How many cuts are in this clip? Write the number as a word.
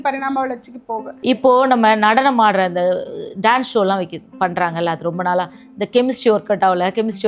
one